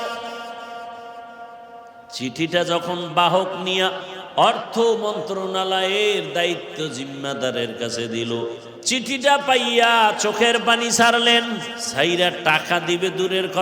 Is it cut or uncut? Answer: cut